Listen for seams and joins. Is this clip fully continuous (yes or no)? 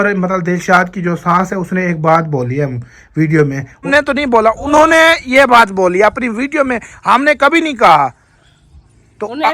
no